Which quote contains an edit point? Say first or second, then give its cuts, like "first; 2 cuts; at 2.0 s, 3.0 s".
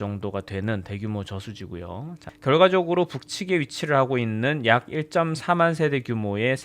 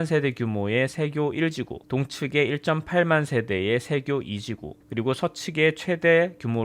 first; 1 cut; at 2.3 s